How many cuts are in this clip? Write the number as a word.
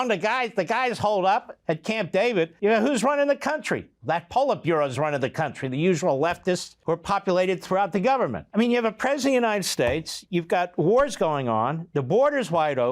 three